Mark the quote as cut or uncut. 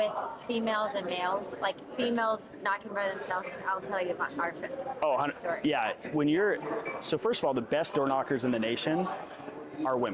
uncut